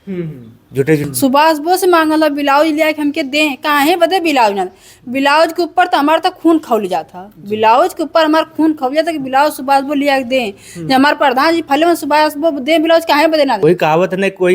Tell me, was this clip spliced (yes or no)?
yes